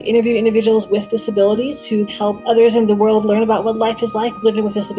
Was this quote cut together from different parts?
yes; 1 cut; at 2.1 s

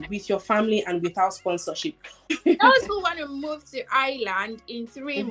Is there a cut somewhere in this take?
yes; 1 cut; at 2.3 s

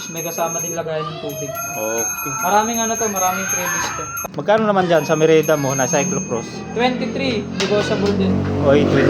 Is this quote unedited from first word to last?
no; 1 cut; at 4.2 s

